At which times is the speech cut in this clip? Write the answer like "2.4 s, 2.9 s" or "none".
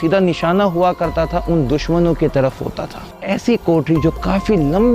3.2 s